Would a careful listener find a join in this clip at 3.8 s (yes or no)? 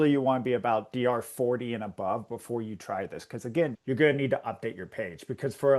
yes